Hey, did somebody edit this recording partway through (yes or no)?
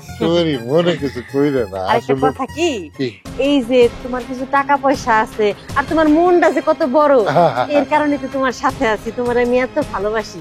no